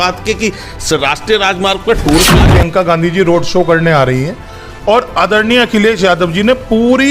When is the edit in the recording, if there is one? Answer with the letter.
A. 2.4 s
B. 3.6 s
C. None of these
A